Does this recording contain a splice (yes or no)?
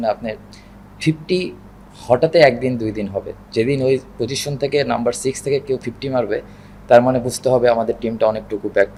no